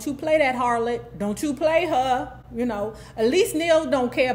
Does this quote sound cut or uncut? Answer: uncut